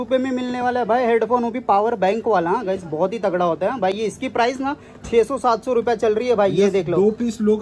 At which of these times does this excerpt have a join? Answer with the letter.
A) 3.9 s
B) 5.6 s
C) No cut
C